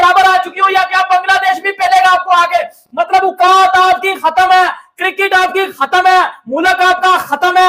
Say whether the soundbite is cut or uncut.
uncut